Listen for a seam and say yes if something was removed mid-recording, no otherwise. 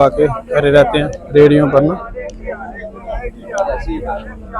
no